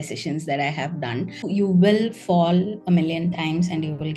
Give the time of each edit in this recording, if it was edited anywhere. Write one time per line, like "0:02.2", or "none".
0:01.4